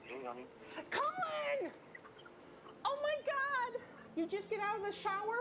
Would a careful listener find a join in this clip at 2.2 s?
no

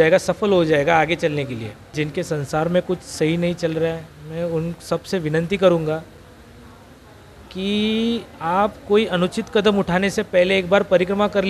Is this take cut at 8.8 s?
no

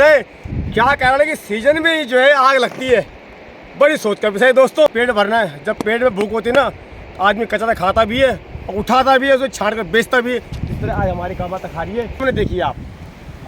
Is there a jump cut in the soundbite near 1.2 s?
no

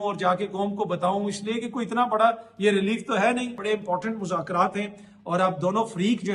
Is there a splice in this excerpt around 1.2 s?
no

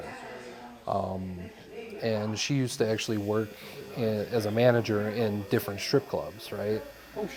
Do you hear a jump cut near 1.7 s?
no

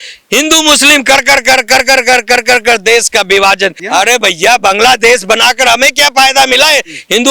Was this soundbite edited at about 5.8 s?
no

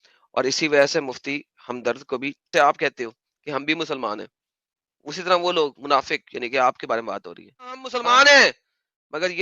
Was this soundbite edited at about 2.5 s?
yes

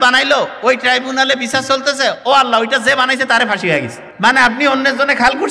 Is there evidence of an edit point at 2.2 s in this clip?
no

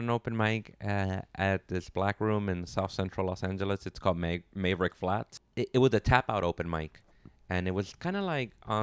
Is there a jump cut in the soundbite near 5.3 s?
yes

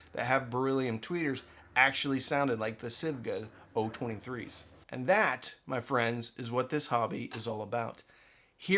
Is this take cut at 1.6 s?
no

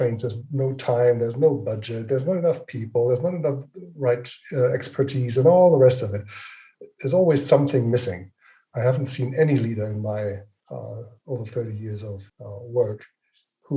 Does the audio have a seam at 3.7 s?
no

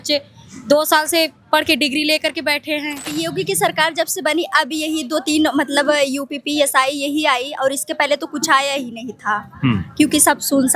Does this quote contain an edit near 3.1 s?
yes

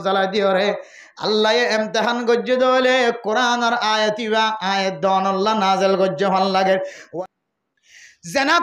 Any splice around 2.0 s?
no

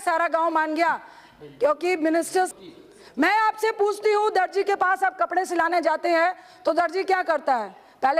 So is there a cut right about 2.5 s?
yes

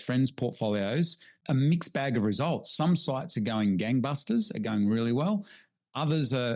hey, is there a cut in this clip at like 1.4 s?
yes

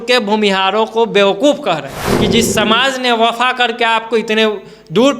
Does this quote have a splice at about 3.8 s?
no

